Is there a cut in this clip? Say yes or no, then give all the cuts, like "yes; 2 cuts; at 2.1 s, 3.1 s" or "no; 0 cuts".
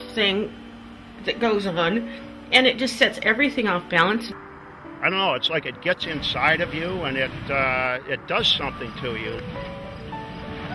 no; 0 cuts